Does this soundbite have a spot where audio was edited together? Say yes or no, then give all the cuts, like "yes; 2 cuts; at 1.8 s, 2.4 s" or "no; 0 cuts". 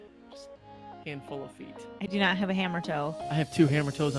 yes; 1 cut; at 3.2 s